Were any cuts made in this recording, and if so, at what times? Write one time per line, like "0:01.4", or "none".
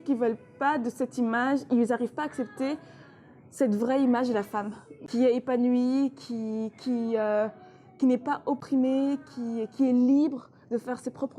0:05.0
0:08.6